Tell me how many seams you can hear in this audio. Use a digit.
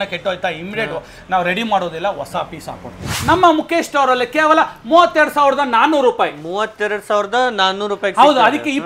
1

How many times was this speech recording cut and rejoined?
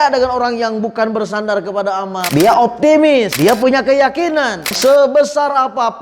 3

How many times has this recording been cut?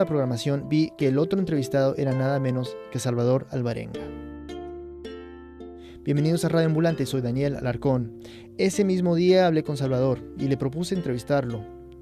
0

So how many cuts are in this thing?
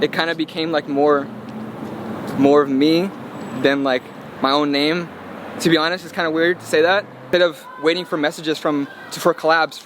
1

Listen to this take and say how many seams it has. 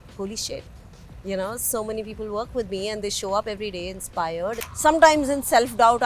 1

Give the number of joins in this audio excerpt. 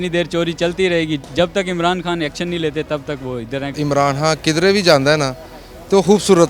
1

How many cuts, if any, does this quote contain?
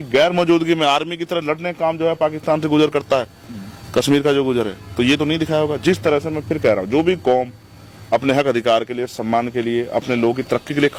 0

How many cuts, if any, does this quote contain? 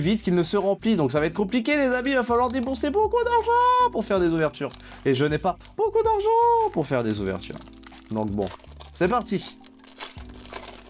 0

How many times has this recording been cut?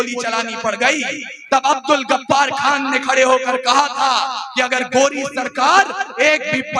0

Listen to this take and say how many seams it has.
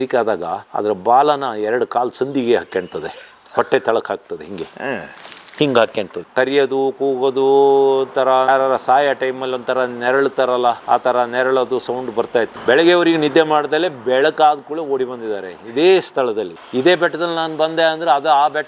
3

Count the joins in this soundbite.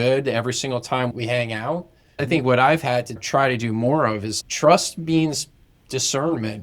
3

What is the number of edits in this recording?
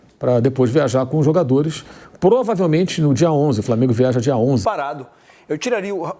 1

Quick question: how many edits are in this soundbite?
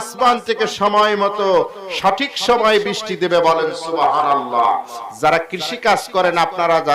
1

